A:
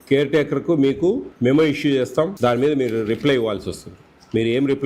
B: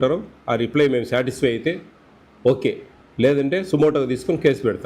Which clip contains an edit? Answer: A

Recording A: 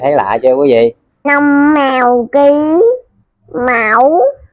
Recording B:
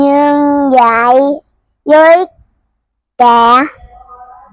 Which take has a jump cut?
A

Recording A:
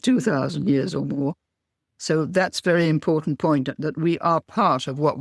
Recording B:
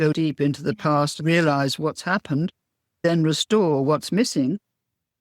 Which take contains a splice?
B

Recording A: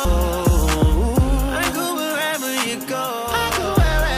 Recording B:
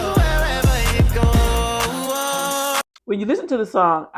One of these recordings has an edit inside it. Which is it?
B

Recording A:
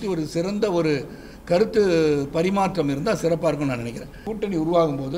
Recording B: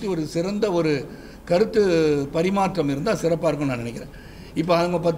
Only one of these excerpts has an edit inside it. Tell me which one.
A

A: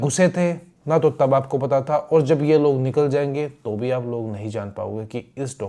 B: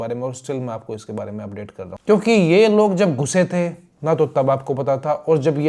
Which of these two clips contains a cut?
B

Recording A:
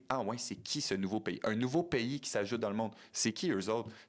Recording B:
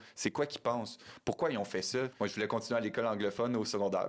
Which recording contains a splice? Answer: B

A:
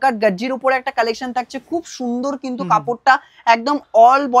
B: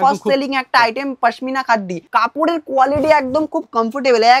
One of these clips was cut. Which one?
B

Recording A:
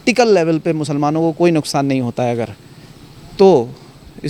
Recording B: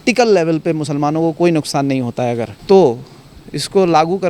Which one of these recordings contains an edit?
B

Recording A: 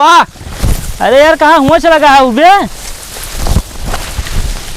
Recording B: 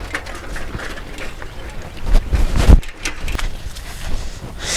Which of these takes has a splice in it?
B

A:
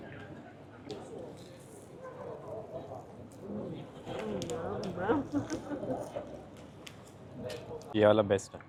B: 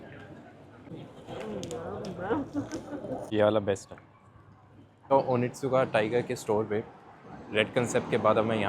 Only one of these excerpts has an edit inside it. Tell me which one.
B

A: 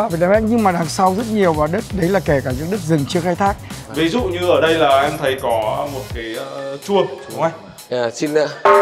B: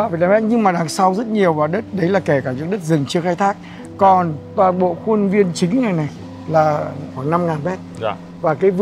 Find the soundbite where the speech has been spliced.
A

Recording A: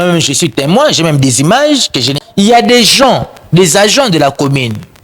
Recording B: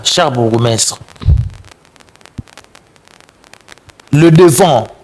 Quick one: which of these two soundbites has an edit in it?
A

